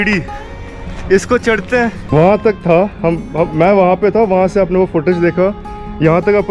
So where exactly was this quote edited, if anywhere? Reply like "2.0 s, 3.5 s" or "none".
2.0 s